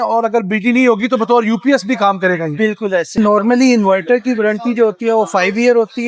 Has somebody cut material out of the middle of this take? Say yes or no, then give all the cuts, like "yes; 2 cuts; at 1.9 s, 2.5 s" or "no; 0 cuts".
yes; 1 cut; at 3.2 s